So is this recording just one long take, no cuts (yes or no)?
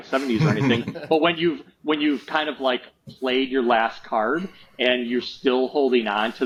yes